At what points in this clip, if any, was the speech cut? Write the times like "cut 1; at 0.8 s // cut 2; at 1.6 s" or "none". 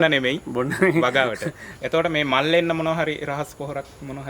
cut 1; at 1.7 s